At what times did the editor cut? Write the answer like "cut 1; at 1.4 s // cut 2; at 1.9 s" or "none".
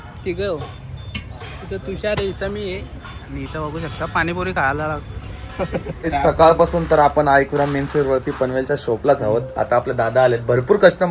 cut 1; at 6.1 s